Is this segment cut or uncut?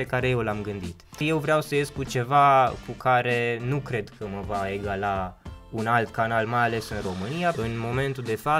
cut